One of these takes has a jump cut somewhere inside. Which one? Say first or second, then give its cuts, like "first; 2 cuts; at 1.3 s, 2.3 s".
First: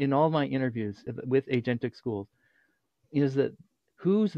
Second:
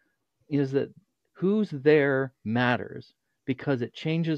first; 1 cut; at 1.0 s